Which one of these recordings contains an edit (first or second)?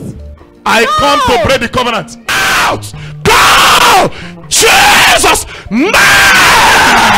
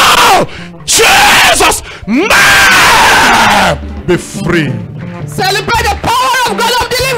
first